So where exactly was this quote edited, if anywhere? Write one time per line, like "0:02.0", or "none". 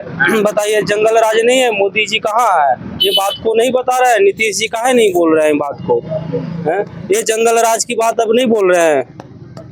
none